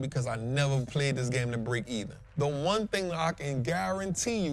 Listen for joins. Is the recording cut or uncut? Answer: cut